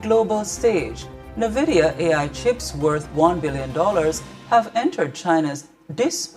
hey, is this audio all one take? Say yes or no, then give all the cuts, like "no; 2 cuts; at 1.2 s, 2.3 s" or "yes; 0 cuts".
no; 2 cuts; at 1.8 s, 4.7 s